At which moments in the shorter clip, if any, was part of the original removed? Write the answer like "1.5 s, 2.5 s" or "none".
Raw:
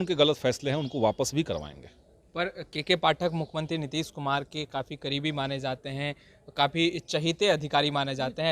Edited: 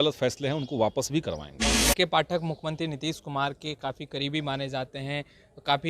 1.8 s